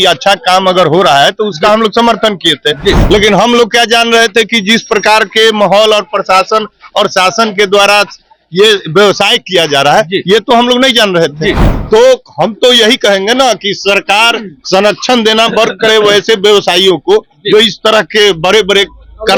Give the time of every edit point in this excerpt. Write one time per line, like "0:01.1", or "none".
none